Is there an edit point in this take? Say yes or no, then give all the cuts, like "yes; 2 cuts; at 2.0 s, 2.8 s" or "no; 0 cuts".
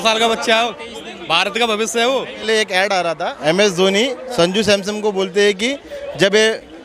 yes; 2 cuts; at 2.4 s, 3.3 s